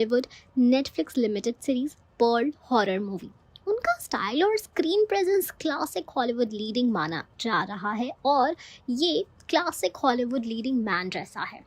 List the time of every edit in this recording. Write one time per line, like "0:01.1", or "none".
0:07.3